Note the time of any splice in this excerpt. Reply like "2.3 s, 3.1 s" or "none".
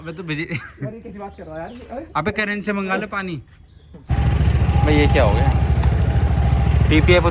4.1 s